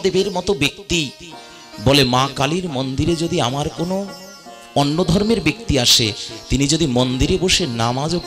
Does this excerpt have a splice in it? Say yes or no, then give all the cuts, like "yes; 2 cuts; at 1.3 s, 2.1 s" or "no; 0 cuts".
no; 0 cuts